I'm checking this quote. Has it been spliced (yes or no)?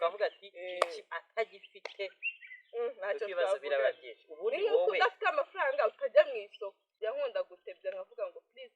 yes